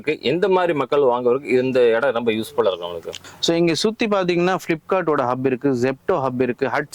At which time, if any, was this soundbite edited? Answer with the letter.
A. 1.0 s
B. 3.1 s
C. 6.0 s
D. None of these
B